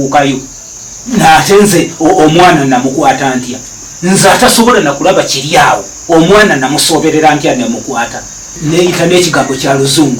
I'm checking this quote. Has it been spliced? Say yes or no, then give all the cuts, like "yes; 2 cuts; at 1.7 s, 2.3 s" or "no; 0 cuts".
yes; 1 cut; at 8.4 s